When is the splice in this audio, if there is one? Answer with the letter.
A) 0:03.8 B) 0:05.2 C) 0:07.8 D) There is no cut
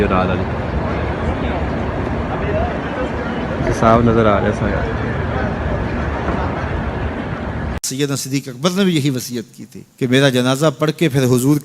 C